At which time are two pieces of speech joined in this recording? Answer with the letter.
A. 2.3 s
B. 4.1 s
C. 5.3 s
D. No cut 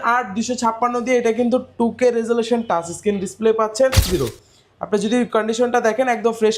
B